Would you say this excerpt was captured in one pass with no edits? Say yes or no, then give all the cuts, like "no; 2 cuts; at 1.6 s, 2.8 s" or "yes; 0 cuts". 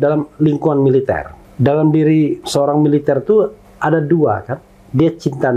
yes; 0 cuts